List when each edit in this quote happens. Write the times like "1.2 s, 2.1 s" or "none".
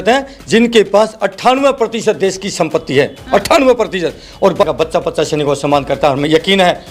4.6 s